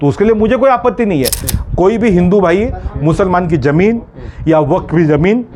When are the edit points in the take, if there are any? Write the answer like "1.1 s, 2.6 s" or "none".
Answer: 1.5 s